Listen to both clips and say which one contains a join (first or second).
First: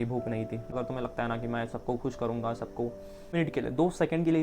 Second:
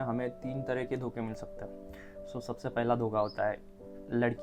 first